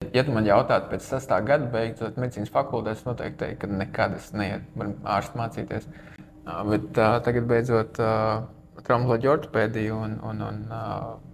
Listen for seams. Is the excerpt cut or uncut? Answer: uncut